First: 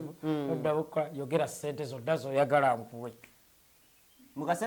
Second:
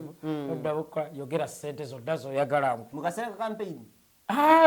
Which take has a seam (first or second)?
second